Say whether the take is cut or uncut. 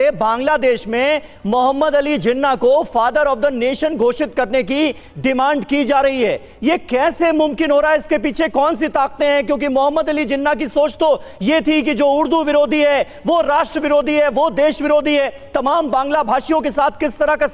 uncut